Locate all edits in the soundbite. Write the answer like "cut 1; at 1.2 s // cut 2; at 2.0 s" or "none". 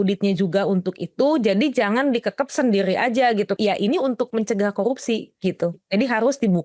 cut 1; at 3.5 s

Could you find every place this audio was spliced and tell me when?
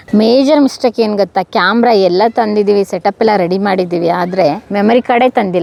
none

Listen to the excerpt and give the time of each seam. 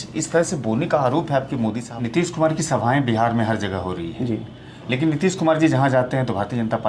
cut 1; at 1.9 s

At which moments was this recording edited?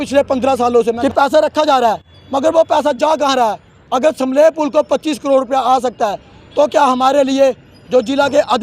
cut 1; at 1.0 s

